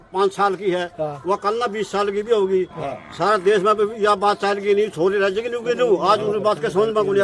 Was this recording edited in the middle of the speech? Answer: no; 0 cuts

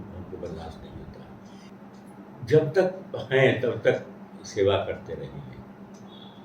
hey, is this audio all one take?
no; 1 cut; at 1.7 s

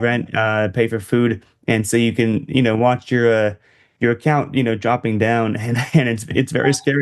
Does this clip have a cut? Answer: no; 0 cuts

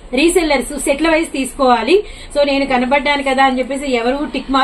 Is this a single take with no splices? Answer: yes; 0 cuts

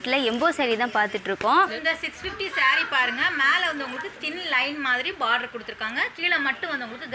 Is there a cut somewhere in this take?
yes; 1 cut; at 1.6 s

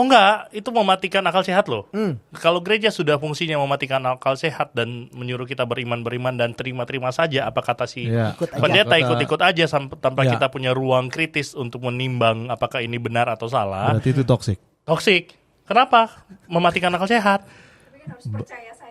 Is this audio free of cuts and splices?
yes; 0 cuts

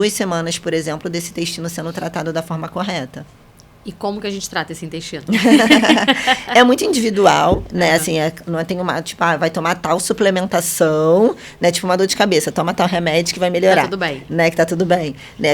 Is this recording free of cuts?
yes; 0 cuts

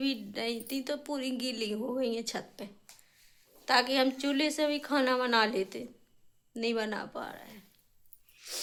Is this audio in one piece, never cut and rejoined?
yes; 0 cuts

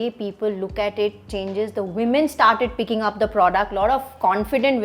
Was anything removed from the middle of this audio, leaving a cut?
no; 0 cuts

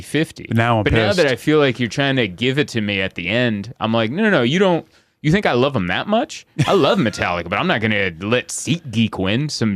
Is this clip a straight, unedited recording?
yes; 0 cuts

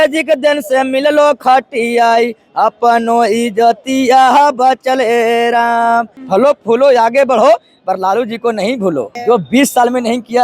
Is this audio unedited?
no; 2 cuts; at 6.2 s, 9.1 s

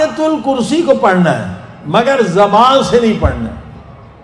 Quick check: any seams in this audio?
no; 0 cuts

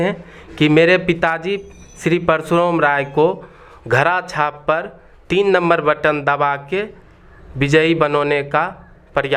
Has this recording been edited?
no; 0 cuts

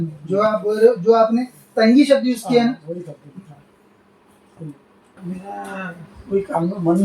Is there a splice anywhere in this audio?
yes; 1 cut; at 5.2 s

